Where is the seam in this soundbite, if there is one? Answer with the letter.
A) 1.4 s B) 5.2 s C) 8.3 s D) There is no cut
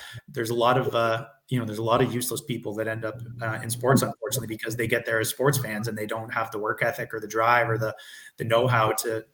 D